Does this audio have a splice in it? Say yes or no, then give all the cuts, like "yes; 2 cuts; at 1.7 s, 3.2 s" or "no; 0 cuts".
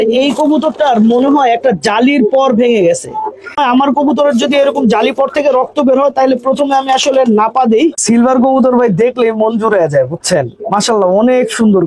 yes; 2 cuts; at 3.6 s, 8.0 s